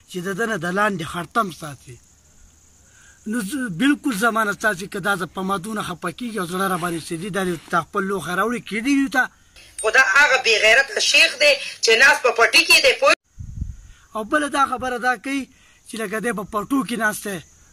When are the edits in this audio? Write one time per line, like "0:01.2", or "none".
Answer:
none